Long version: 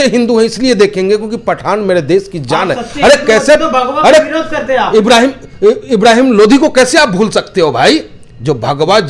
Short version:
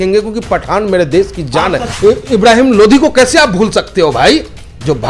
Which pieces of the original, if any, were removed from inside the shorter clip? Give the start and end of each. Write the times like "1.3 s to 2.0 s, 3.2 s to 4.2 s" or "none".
2.8 s to 5.5 s